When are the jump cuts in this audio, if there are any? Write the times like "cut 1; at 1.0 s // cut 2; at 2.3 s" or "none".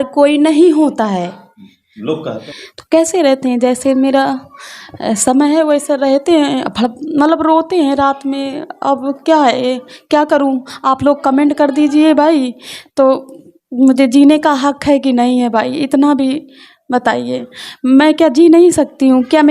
cut 1; at 2.4 s